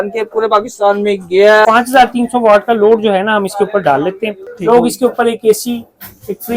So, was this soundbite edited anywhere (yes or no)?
yes